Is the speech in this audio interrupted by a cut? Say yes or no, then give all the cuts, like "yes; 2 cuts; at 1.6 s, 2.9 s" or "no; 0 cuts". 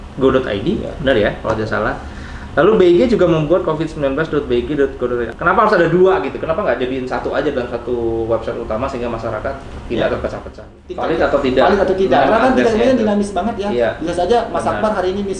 yes; 2 cuts; at 5.3 s, 11.0 s